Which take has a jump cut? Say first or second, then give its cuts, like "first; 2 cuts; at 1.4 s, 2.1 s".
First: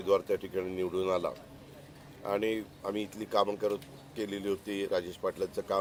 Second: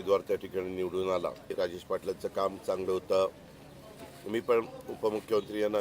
second; 1 cut; at 1.5 s